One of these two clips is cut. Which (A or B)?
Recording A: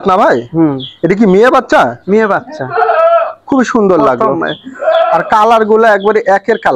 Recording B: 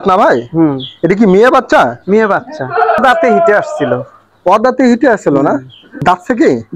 B